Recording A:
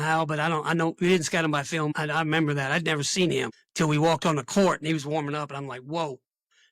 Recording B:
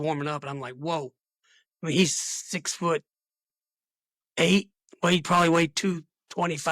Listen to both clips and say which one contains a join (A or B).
A